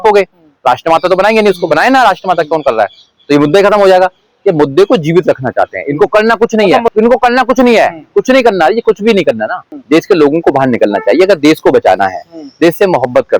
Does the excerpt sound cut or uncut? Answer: cut